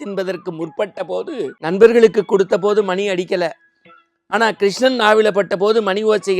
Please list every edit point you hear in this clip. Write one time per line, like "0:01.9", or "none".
0:01.6